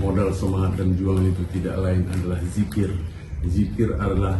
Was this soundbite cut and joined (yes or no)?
no